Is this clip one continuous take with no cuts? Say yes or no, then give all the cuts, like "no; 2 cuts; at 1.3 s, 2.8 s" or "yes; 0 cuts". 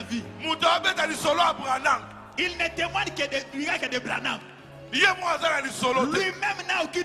yes; 0 cuts